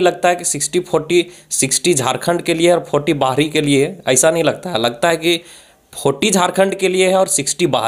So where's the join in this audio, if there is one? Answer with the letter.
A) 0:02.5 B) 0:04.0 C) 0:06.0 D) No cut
D